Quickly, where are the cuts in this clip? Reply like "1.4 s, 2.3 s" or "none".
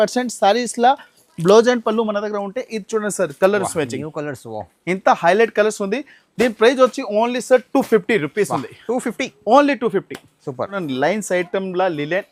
none